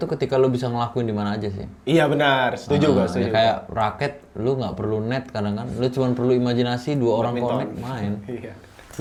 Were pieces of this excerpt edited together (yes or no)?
no